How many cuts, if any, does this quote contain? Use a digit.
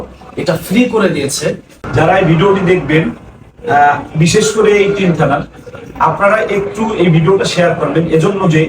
1